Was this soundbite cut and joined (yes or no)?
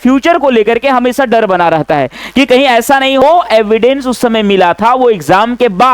yes